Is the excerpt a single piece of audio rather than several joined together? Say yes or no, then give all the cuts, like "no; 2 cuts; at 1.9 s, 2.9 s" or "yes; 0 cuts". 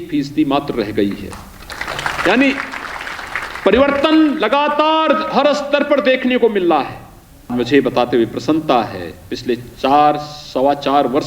no; 1 cut; at 7.5 s